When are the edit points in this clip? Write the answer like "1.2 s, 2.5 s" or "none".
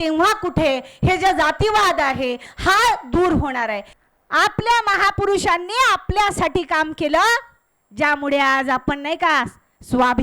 3.9 s